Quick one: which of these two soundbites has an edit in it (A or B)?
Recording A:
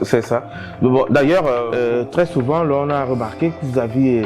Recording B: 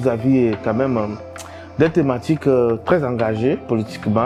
A